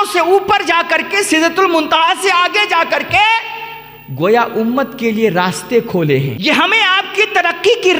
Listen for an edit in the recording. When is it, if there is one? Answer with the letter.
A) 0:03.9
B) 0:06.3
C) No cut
B